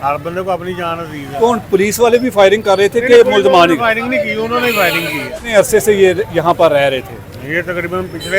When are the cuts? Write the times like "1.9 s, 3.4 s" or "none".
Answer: 5.2 s